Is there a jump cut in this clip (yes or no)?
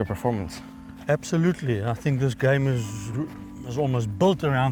no